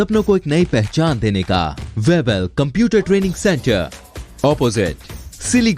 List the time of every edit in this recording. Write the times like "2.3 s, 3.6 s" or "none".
1.8 s